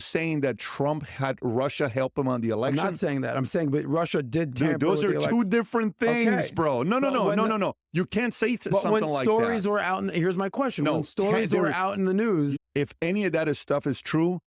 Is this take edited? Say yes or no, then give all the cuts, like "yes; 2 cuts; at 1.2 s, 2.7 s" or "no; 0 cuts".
yes; 1 cut; at 12.6 s